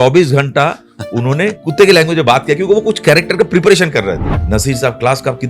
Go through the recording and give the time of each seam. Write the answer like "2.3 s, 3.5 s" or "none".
1.6 s, 4.3 s